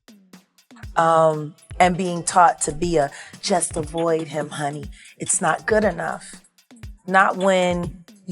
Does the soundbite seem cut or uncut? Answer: cut